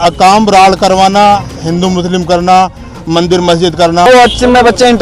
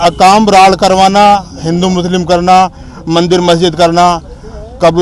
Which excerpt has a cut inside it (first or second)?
first